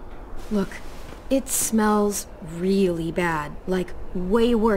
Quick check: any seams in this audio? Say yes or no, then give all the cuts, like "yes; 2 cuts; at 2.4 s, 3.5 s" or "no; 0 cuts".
no; 0 cuts